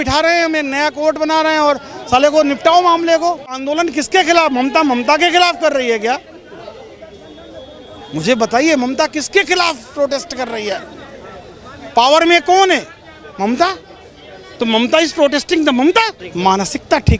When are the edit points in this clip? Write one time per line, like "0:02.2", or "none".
0:03.6
0:16.2